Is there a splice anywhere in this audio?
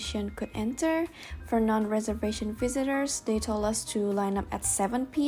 no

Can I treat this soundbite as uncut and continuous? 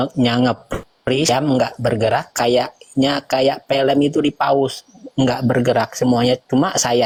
yes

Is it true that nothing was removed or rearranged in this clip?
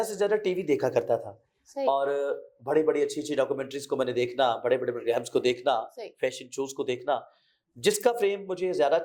yes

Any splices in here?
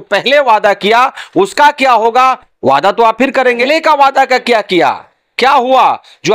yes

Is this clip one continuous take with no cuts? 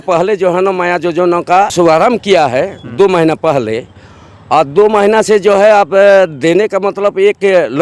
no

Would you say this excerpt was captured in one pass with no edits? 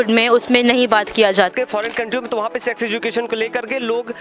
no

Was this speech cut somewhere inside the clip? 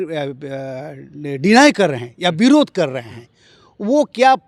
no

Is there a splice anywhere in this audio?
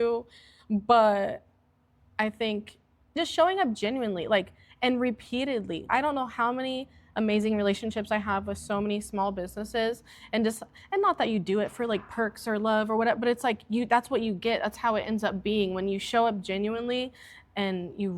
yes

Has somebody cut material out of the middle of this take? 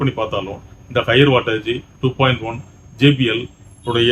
no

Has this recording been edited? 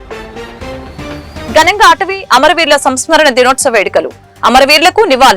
yes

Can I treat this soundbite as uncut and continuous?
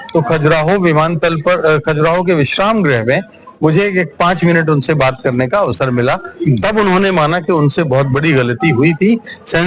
yes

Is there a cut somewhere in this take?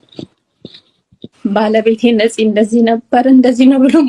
no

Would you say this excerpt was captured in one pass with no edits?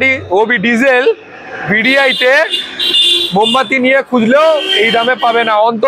yes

